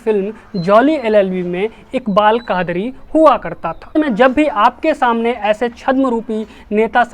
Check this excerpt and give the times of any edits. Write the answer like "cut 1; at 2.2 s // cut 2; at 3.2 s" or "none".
cut 1; at 3.9 s